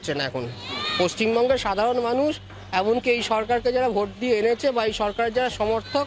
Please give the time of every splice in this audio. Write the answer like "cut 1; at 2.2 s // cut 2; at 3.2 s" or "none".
none